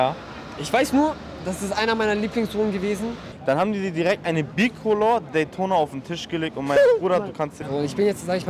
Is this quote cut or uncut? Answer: cut